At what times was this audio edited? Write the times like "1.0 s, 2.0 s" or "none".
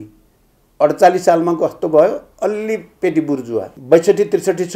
3.7 s